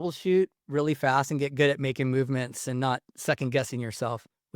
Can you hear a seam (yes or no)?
yes